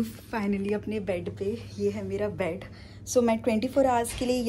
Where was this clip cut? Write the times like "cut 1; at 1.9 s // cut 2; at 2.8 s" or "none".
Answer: none